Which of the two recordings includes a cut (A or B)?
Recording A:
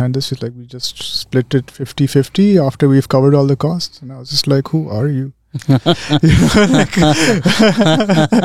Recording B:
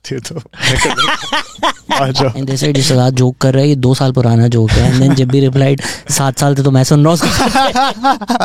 B